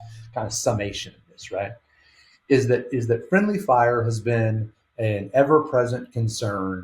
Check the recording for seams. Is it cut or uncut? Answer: uncut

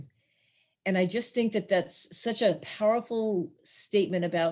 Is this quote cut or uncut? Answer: uncut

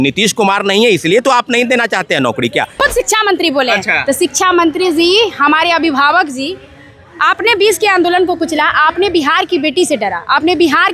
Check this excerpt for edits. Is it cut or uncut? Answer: cut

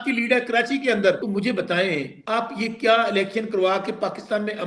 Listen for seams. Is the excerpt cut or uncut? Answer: cut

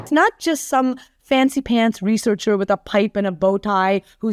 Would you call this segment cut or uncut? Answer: uncut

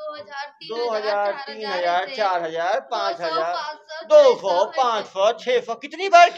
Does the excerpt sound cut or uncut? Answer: uncut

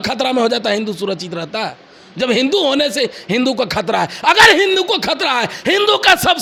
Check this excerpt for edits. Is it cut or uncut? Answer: uncut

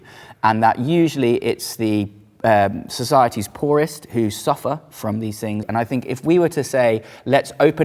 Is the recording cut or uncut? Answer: uncut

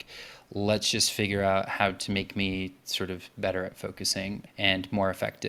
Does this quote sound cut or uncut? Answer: uncut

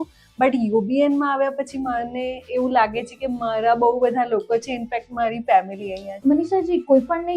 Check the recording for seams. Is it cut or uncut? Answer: cut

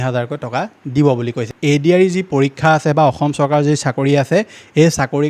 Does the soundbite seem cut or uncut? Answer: cut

